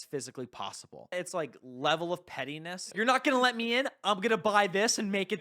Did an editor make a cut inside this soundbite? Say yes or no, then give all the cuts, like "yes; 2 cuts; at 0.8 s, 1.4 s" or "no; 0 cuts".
yes; 2 cuts; at 1.1 s, 2.8 s